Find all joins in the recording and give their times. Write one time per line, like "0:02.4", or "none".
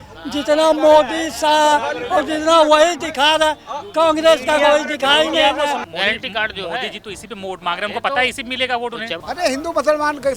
0:05.8
0:09.1